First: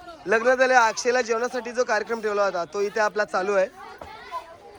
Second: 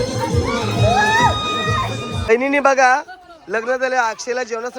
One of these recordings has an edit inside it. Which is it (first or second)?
second